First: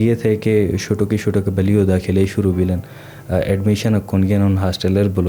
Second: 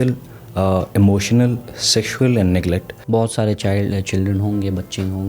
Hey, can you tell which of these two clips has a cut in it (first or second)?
second